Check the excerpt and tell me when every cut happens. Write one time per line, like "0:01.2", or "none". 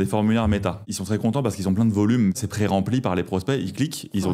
0:00.9
0:02.4